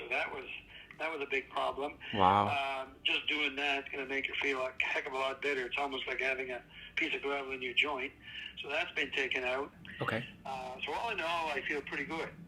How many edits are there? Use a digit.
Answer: 0